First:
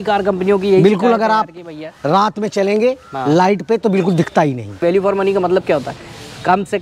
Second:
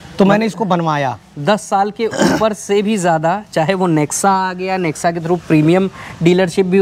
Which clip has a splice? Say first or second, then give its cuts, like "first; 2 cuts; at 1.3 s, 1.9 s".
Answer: first; 1 cut; at 4.8 s